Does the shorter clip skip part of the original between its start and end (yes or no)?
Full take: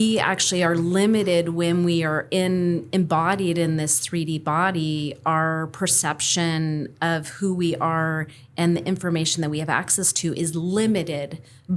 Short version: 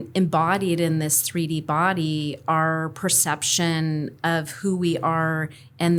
no